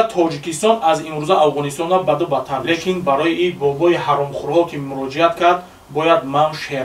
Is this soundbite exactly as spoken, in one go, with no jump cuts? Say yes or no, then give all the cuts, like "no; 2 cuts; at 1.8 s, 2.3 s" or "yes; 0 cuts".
no; 1 cut; at 2.6 s